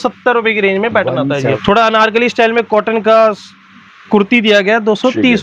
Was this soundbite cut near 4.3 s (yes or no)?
no